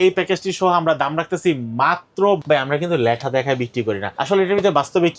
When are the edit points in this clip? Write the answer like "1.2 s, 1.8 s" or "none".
2.4 s, 4.1 s